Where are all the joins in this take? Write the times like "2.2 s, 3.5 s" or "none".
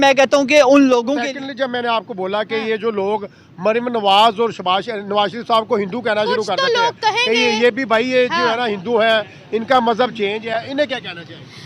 1.2 s